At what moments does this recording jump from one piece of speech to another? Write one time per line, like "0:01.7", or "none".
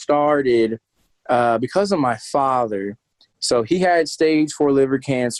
none